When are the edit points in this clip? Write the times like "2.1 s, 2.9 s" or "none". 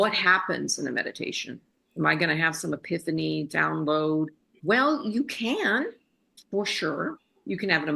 4.5 s